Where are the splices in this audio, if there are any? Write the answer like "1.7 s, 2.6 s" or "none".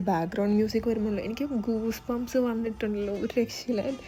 none